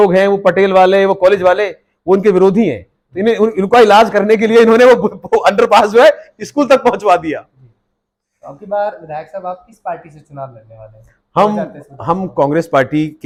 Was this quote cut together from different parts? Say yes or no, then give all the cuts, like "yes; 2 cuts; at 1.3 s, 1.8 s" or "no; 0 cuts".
no; 0 cuts